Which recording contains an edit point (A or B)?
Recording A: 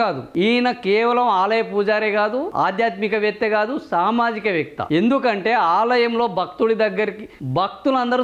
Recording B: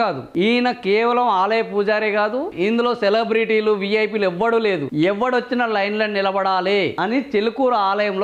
B